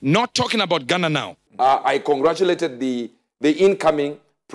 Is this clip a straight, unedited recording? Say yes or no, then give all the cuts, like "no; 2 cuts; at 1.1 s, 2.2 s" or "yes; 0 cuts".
no; 1 cut; at 1.3 s